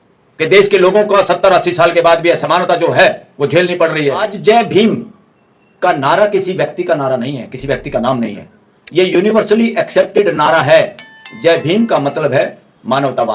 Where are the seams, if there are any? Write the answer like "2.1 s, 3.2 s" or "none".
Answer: 4.3 s